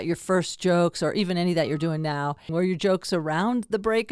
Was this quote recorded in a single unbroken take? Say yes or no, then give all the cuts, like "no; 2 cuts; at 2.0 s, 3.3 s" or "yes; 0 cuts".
no; 1 cut; at 2.5 s